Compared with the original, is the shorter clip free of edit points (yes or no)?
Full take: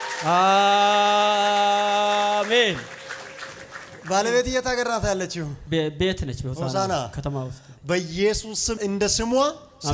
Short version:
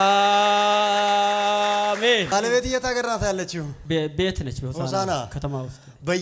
no